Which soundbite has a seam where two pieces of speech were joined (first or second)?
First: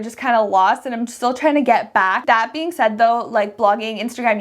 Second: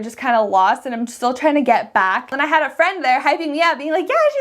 second